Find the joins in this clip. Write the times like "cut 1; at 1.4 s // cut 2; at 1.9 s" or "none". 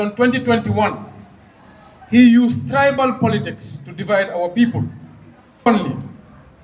cut 1; at 5.7 s